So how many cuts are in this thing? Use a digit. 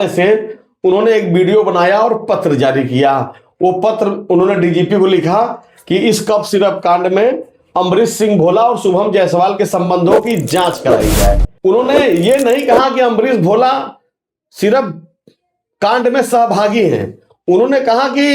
0